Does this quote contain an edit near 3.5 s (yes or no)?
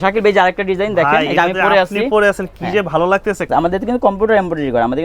yes